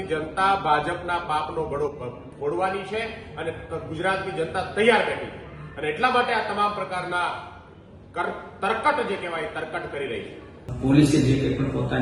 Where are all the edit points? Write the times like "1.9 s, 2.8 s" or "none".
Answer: 10.7 s